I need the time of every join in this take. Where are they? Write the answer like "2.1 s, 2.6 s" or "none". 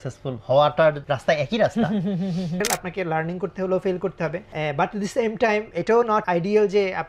1.1 s, 2.6 s, 4.5 s, 6.2 s